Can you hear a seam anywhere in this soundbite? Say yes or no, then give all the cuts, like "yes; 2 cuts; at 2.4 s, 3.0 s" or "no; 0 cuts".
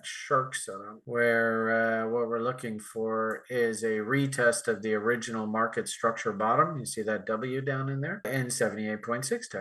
yes; 1 cut; at 8.3 s